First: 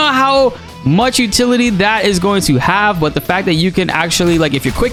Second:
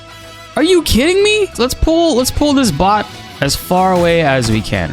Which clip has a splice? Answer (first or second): second